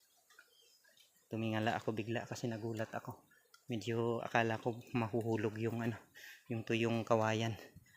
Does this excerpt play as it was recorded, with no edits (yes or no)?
yes